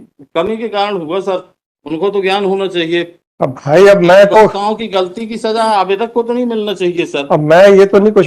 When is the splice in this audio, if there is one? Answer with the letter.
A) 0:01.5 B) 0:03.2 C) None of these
B